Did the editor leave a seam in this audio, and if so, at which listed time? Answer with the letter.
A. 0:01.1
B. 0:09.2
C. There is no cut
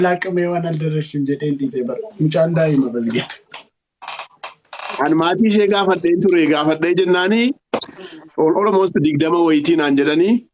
C